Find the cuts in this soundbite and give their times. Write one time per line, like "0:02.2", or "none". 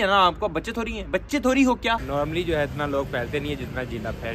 0:02.0